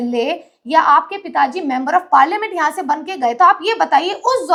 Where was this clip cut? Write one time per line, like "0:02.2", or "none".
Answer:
none